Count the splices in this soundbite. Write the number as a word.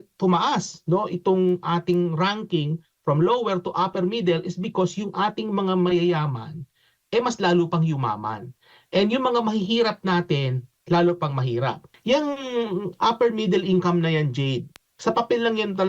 one